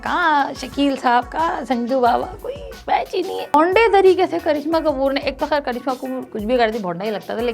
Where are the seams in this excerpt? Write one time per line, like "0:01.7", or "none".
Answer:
0:03.5

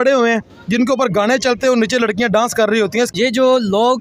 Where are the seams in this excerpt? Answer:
0:03.1

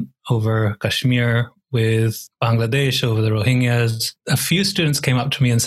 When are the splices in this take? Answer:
0:02.2
0:04.2

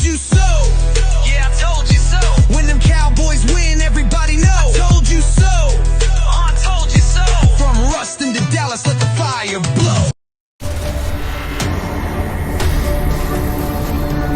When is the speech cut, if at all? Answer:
0:10.9

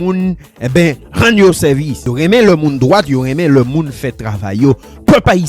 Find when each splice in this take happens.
0:02.0

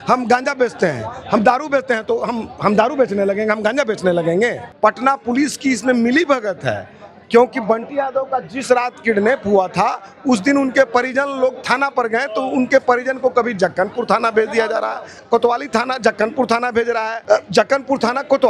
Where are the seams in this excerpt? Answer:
0:04.6
0:15.1
0:17.2

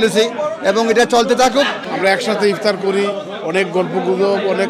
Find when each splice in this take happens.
0:01.8

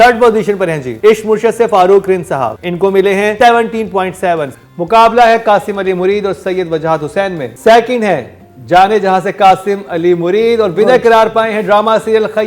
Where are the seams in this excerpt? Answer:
0:00.9
0:02.6
0:03.3
0:07.5

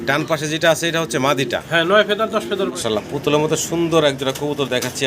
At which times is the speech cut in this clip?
0:02.7

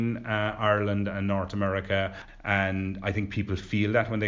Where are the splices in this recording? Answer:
0:02.3

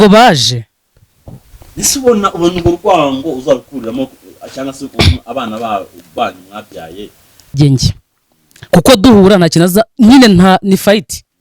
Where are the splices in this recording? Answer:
0:07.5

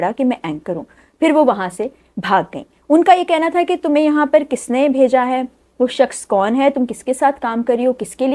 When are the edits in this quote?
none

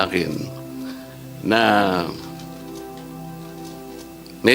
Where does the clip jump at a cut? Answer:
none

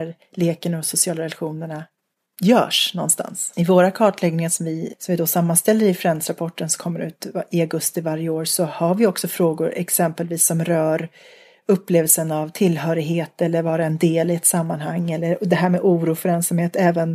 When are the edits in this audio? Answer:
0:03.4
0:04.9

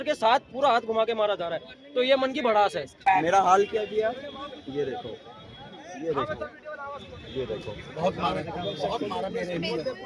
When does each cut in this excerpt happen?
0:03.1

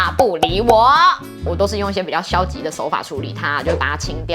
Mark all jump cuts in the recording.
0:01.5

